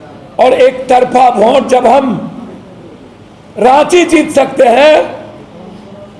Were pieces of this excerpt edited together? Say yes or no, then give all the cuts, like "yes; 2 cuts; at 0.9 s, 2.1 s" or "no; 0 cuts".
no; 0 cuts